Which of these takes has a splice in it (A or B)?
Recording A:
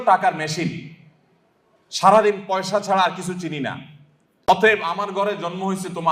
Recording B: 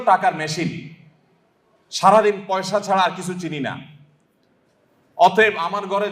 A